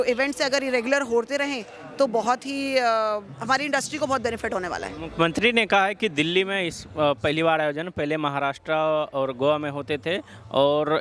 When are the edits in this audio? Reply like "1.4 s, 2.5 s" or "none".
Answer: none